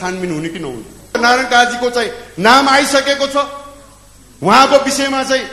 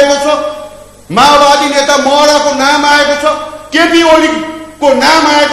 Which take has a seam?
first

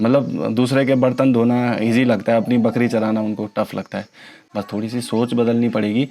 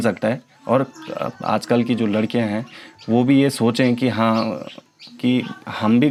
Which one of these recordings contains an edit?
first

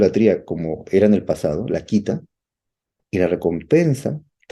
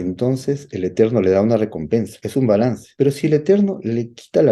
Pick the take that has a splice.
second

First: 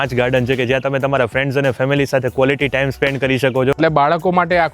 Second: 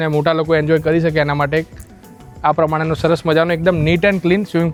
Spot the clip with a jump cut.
first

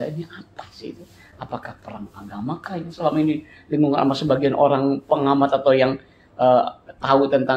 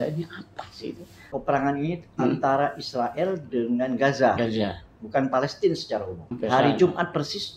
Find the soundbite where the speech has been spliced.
second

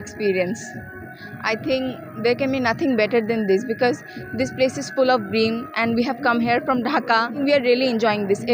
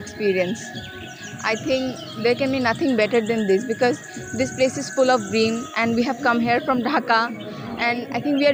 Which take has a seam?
first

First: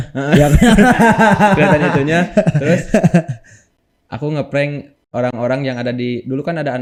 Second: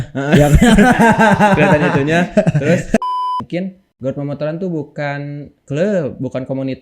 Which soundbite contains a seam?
second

